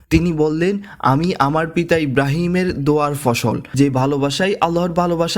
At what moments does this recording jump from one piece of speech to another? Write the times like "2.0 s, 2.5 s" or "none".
3.6 s